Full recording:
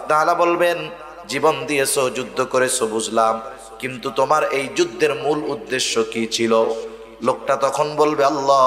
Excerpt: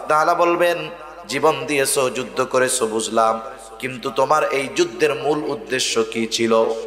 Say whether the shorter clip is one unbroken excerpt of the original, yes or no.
yes